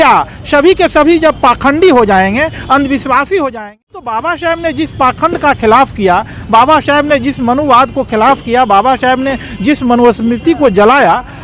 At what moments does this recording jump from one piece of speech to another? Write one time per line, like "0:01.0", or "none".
0:03.6